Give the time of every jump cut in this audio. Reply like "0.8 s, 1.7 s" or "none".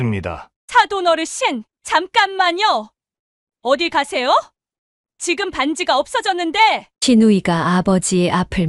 none